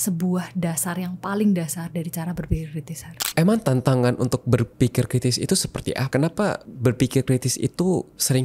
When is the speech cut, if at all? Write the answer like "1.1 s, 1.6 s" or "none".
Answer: 3.1 s, 6.0 s, 6.7 s